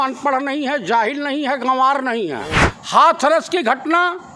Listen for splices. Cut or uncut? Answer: cut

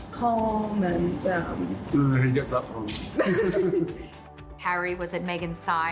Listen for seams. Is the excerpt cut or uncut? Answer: cut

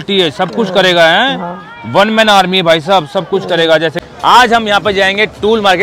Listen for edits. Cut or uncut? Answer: cut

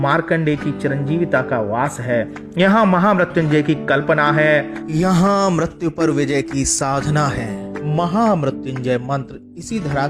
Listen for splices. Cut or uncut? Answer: uncut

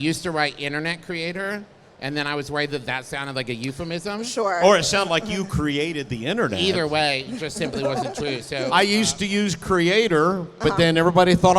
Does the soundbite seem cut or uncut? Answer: cut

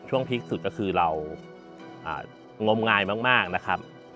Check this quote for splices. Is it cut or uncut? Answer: uncut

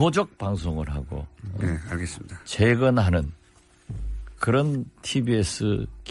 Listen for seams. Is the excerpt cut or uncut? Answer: uncut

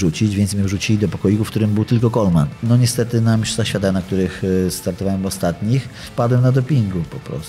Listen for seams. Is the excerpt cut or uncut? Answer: cut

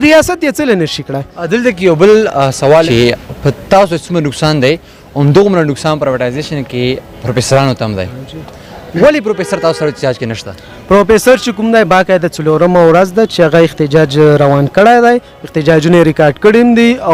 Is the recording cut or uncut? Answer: uncut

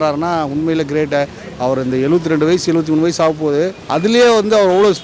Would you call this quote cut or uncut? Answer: cut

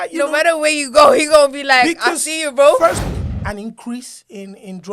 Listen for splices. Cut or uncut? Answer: cut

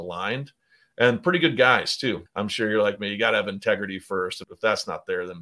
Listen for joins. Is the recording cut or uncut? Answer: cut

